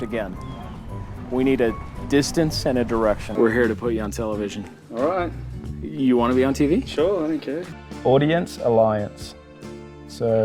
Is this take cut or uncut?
cut